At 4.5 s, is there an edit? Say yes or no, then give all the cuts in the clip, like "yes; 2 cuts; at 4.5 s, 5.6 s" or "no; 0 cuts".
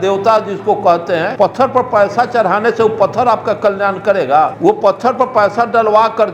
yes; 2 cuts; at 1.3 s, 4.5 s